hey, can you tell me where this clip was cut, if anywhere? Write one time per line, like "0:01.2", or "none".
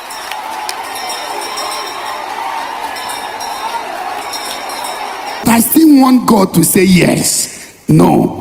0:05.4